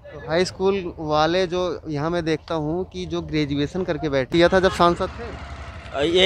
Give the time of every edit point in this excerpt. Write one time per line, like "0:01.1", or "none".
0:04.3